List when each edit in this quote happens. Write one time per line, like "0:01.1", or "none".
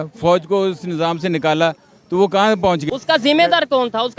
0:02.8